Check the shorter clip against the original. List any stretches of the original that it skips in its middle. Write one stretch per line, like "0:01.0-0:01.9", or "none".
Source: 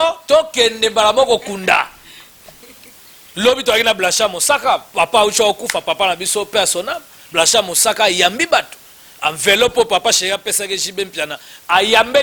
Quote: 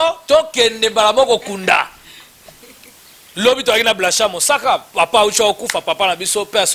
none